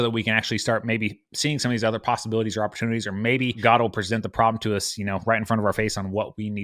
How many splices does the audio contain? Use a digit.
1